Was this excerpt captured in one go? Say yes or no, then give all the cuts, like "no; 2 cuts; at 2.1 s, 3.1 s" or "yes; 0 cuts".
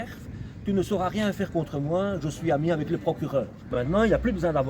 no; 1 cut; at 3.7 s